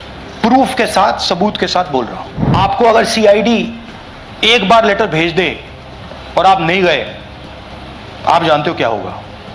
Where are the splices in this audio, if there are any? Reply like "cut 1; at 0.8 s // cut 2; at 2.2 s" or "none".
cut 1; at 2.6 s